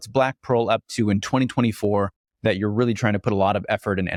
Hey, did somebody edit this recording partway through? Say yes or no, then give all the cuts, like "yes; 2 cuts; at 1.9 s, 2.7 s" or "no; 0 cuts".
no; 0 cuts